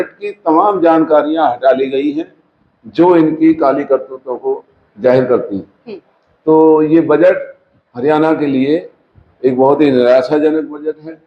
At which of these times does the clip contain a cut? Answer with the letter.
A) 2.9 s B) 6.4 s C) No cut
C